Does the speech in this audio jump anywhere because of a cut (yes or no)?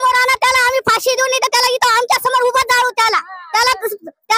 no